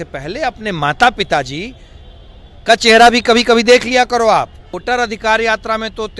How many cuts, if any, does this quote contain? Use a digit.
1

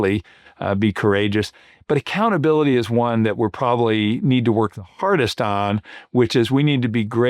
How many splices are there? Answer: 0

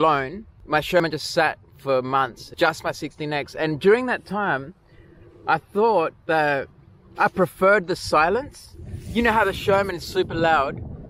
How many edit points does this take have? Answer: 2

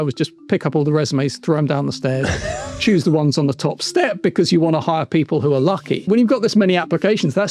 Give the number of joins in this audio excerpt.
1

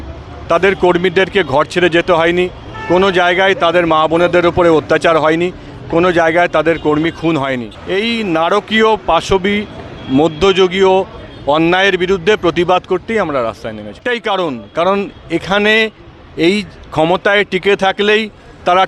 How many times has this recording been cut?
2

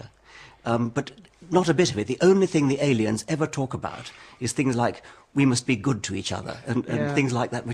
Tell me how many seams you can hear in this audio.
1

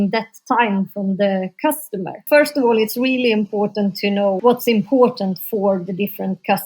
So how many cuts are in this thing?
2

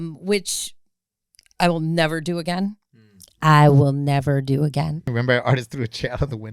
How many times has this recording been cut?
1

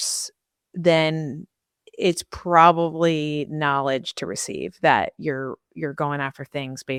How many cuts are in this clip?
0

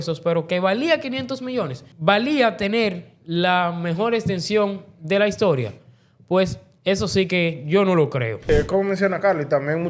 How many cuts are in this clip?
2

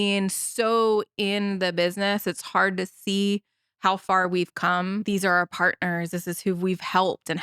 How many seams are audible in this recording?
1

